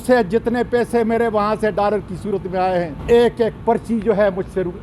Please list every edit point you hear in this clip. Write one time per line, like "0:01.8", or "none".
0:03.0